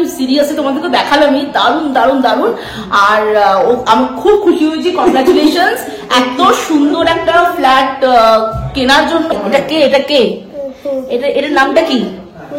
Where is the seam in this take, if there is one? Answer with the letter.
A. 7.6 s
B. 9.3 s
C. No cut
B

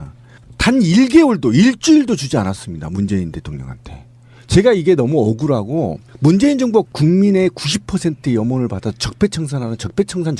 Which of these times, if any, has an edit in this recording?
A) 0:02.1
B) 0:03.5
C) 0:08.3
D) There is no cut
B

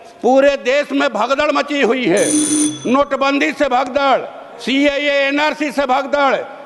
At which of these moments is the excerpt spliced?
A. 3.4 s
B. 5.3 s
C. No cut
C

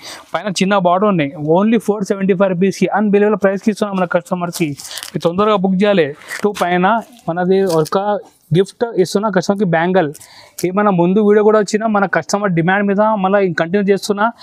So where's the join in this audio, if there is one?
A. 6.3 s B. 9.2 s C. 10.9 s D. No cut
A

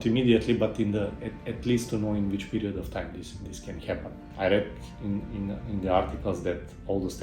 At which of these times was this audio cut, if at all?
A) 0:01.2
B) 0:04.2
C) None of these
B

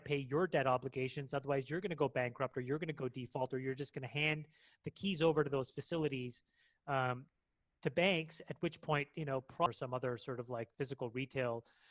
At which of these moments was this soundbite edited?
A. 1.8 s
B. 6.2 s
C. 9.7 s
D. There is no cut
C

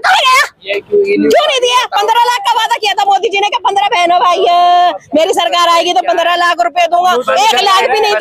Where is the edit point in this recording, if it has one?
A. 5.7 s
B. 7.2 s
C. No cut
C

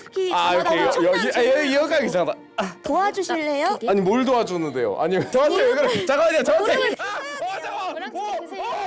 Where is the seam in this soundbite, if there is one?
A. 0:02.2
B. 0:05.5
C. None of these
C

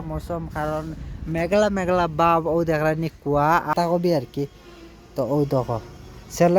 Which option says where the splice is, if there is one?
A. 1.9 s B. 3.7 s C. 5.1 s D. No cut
B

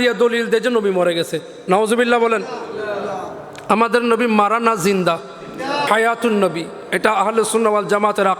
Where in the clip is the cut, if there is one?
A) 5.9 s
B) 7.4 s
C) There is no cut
A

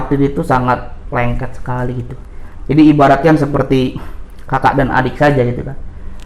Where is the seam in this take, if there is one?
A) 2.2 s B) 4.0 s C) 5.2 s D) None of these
D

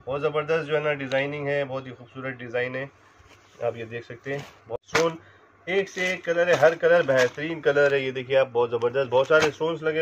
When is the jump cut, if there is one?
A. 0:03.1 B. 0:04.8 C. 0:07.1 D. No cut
B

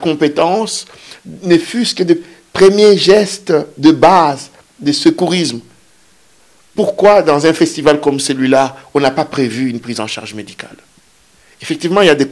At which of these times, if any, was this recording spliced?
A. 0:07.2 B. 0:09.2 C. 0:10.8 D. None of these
D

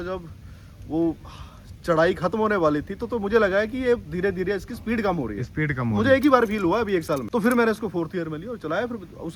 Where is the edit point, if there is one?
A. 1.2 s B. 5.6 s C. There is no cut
C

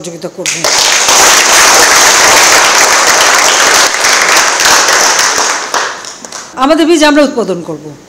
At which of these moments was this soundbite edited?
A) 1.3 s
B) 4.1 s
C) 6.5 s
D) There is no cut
C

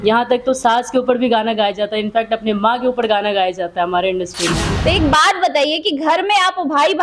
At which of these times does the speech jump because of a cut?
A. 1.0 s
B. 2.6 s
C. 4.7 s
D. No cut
C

